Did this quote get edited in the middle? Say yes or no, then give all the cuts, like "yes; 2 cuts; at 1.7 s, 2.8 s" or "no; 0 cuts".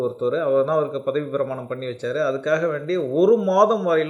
no; 0 cuts